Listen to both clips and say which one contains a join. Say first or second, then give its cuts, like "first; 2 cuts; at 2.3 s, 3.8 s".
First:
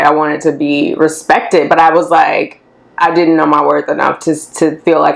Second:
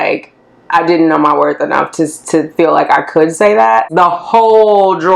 second; 1 cut; at 3.9 s